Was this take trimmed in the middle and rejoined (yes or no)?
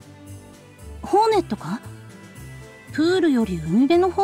yes